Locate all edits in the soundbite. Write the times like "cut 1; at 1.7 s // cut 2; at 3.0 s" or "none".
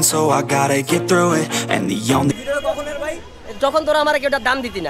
cut 1; at 2.3 s